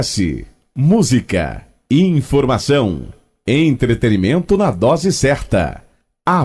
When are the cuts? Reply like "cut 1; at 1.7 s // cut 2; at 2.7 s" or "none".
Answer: none